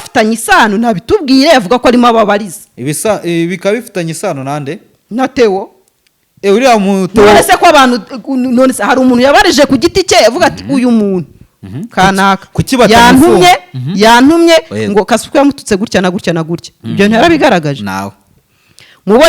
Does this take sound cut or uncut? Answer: uncut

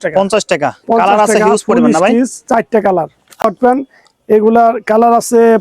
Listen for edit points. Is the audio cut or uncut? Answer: cut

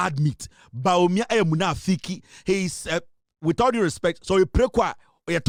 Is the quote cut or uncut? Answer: uncut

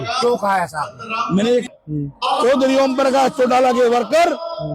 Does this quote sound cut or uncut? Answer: cut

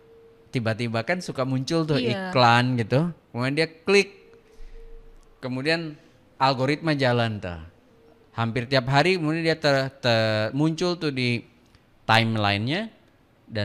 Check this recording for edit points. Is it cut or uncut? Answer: uncut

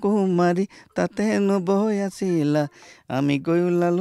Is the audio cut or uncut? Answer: uncut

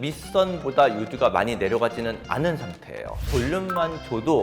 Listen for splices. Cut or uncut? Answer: cut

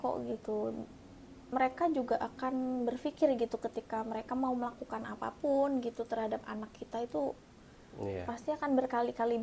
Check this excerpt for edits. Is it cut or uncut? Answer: uncut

